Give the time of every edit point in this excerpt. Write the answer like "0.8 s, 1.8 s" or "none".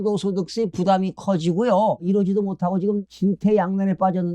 2.0 s, 3.1 s

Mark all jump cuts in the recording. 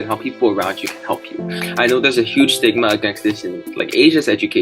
1.5 s

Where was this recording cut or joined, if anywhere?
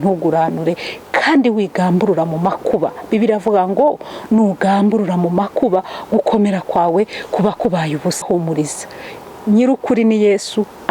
8.2 s

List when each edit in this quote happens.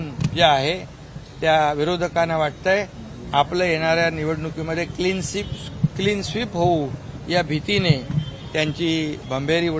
none

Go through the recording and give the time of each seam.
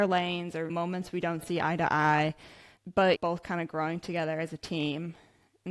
none

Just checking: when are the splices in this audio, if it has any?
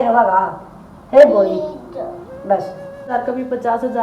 3.1 s

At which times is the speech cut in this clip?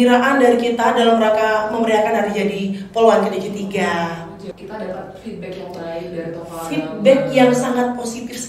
4.5 s

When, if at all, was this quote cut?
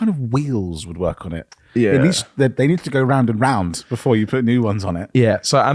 none

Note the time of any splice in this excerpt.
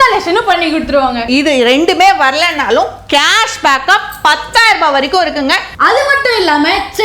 1.2 s, 5.7 s

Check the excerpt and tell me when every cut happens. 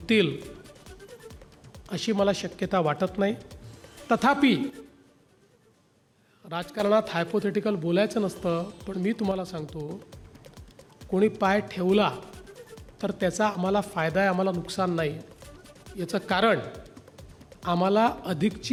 none

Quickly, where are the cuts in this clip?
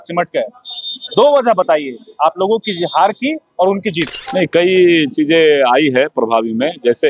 4.2 s

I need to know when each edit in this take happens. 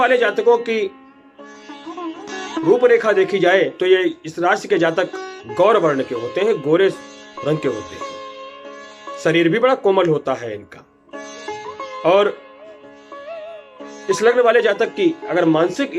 none

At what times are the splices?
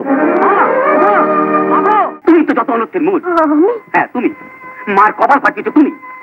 2.1 s

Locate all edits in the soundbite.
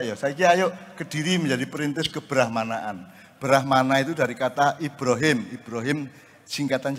none

